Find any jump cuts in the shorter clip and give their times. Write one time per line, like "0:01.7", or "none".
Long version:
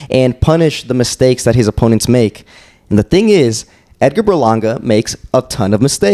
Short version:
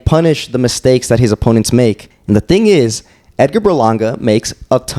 0:02.1